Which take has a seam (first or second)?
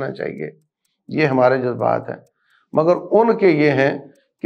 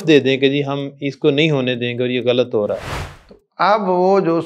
second